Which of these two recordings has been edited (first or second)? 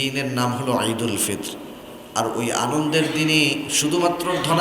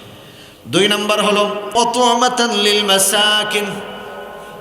second